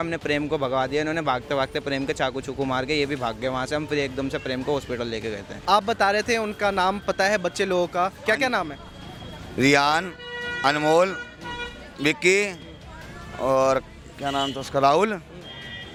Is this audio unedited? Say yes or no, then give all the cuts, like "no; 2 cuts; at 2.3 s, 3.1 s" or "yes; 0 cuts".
yes; 0 cuts